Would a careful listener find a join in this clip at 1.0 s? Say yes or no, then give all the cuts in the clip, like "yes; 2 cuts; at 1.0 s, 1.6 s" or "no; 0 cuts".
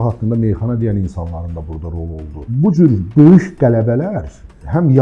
no; 1 cut; at 2.5 s